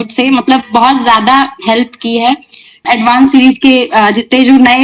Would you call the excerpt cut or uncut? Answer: cut